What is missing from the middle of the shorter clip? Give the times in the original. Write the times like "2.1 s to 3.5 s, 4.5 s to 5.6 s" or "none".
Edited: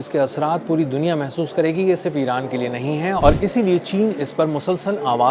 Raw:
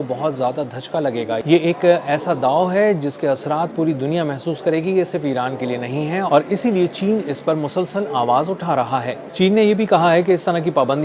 none